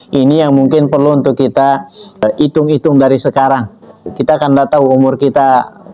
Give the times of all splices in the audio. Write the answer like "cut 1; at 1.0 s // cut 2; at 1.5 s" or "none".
cut 1; at 2.2 s // cut 2; at 4.0 s

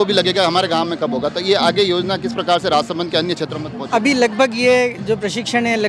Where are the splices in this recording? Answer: none

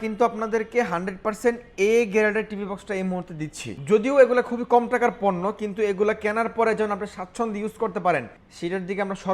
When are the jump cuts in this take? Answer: cut 1; at 3.8 s

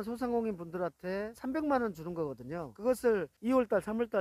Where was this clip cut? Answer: cut 1; at 1.4 s // cut 2; at 2.7 s // cut 3; at 3.3 s

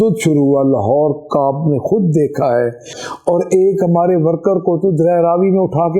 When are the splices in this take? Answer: cut 1; at 3.0 s

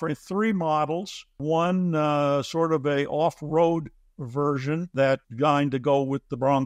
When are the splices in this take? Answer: cut 1; at 1.4 s

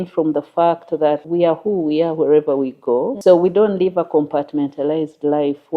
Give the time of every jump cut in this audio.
cut 1; at 1.2 s // cut 2; at 3.1 s

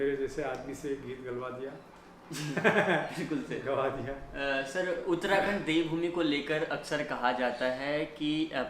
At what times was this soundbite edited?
none

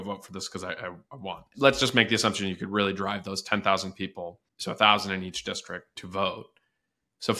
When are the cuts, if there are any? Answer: cut 1; at 1.5 s // cut 2; at 4.5 s // cut 3; at 6.0 s

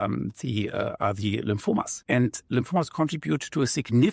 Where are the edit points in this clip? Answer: cut 1; at 2.0 s

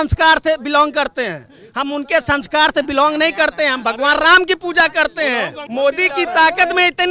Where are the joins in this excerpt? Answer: cut 1; at 5.6 s

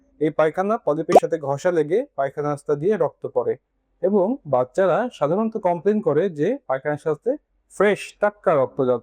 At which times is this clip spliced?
none

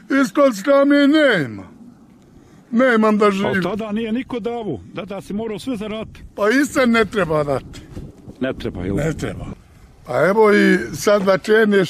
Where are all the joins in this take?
cut 1; at 9.5 s

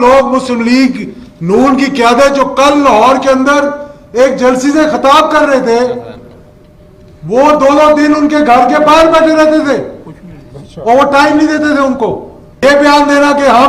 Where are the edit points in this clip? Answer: cut 1; at 12.6 s

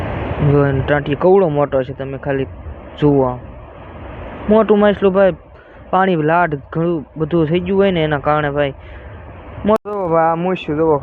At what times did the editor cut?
cut 1; at 9.8 s

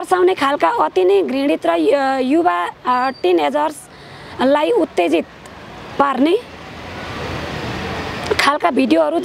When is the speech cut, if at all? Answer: none

